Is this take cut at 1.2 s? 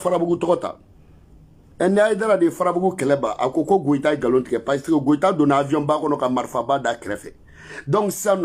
no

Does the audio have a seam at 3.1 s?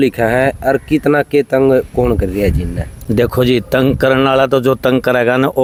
no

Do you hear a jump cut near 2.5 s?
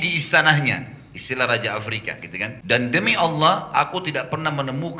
yes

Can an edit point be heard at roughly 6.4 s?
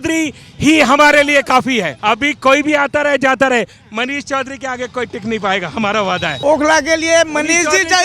yes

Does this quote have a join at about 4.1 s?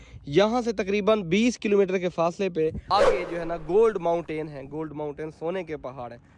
no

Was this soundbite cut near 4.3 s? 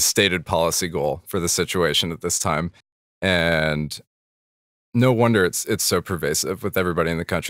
no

